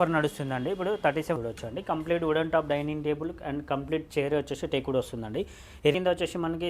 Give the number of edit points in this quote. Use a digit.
2